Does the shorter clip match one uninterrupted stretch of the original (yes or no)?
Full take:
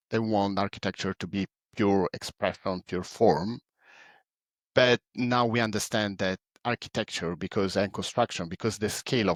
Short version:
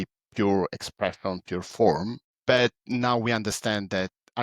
no